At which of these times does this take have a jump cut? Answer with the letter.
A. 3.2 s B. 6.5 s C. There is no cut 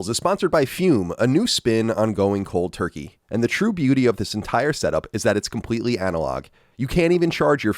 A